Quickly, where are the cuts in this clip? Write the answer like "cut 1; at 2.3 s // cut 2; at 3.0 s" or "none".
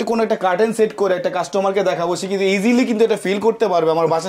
none